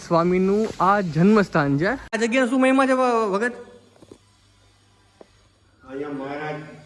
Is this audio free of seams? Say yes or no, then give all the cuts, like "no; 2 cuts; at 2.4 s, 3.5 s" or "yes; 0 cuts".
no; 1 cut; at 2.2 s